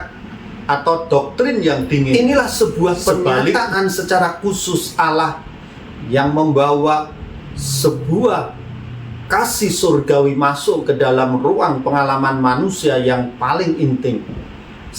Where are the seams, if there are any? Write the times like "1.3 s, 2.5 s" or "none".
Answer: 2.2 s